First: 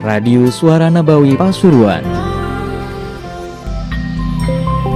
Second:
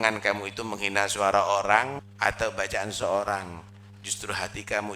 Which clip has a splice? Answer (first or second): second